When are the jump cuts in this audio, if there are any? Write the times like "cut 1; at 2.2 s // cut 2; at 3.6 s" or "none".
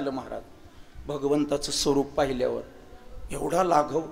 none